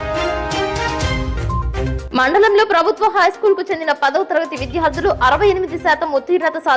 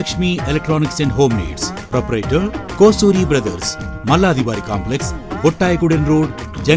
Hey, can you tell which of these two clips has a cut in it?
first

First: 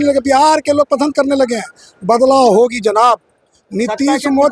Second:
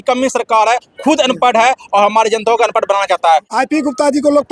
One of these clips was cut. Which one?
second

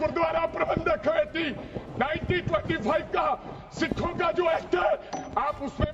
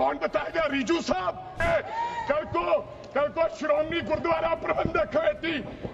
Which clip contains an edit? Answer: second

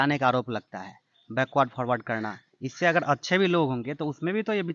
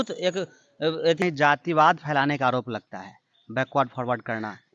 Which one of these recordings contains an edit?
second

